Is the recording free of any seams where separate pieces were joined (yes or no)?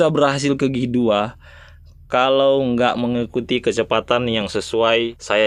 yes